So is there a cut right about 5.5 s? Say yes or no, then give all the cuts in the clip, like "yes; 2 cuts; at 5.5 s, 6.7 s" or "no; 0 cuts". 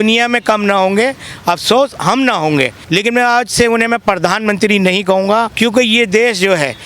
yes; 2 cuts; at 2.8 s, 5.5 s